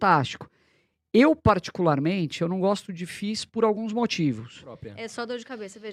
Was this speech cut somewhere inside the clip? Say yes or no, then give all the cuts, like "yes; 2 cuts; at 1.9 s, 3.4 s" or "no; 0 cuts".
yes; 1 cut; at 4.9 s